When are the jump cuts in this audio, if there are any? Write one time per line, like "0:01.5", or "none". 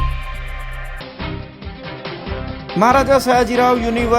none